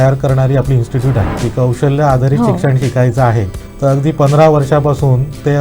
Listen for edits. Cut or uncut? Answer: cut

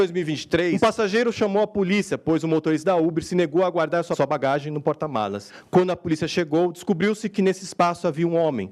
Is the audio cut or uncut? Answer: cut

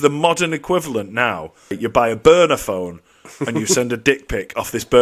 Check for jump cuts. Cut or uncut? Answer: cut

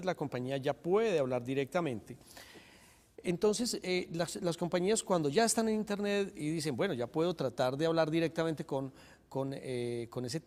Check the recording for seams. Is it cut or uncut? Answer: uncut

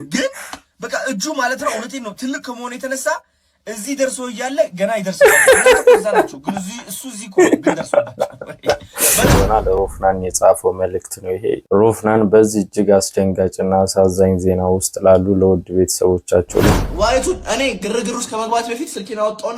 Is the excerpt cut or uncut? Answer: cut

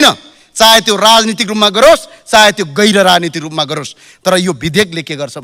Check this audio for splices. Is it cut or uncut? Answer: uncut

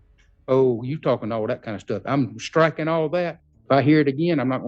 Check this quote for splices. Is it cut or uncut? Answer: cut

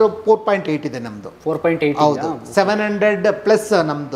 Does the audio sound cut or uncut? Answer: uncut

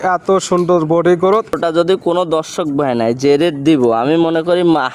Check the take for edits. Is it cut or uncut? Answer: cut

